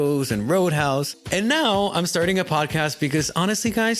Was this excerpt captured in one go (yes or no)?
no